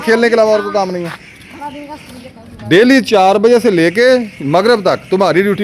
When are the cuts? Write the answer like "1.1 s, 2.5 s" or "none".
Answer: none